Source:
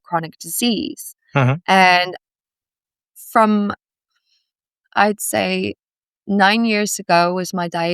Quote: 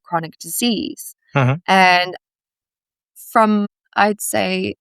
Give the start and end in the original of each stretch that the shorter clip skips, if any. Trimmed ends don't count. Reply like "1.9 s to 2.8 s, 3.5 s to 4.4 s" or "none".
3.8 s to 4.8 s

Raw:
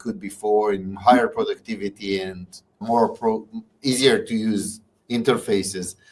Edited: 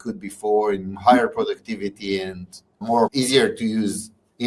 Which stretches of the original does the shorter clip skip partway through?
3.1 s to 3.8 s

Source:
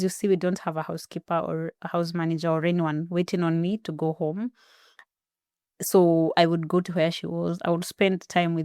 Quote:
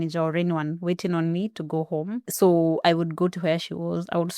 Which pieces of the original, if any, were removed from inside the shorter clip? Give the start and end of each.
4.6 s to 5.8 s

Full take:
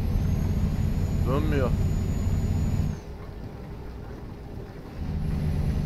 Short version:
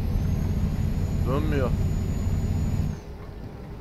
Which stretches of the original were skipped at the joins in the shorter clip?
none

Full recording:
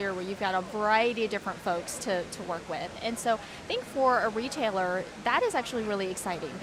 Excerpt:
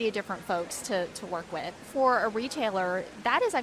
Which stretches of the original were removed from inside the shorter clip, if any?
3.0 s to 3.8 s

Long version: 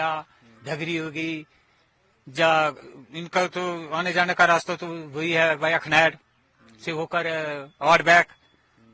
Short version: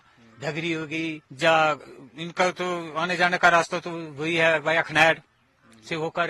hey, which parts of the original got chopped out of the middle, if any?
1.5 s to 2.2 s

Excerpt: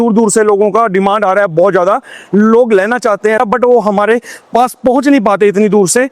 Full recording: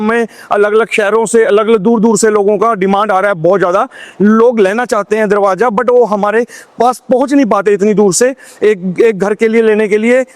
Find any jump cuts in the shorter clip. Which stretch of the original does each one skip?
5.3 s to 5.6 s

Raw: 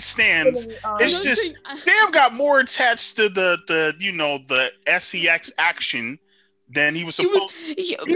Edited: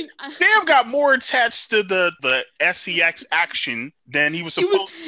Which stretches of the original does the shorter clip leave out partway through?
3.6 s to 4.4 s, 6.2 s to 6.6 s

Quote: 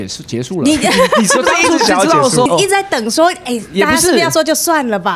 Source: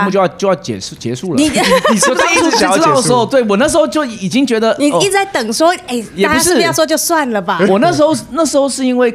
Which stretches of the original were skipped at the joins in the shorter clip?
3.2 s to 4.9 s

